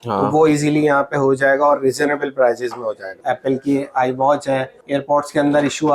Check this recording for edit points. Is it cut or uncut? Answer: cut